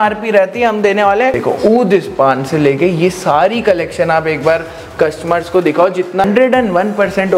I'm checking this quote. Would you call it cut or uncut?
cut